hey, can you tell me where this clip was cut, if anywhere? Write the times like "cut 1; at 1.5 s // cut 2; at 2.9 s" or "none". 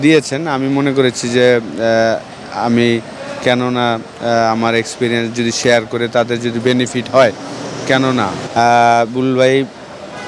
cut 1; at 8.4 s